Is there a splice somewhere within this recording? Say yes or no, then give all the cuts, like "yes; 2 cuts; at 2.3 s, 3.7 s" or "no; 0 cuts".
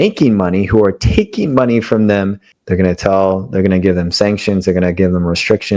yes; 1 cut; at 2.5 s